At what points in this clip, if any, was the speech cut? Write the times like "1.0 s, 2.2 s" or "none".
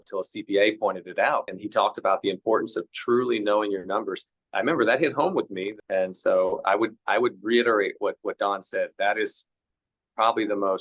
1.6 s, 5.6 s